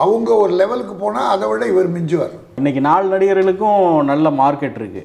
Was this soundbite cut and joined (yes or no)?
yes